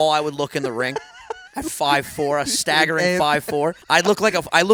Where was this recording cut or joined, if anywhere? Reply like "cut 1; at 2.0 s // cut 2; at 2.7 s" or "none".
cut 1; at 3.8 s